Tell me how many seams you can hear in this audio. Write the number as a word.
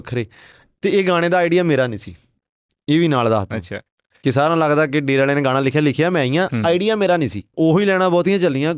one